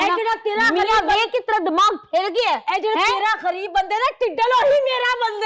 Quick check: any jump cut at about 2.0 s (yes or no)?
no